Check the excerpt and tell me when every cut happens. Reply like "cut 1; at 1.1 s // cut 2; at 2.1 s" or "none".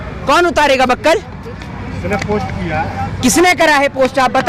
none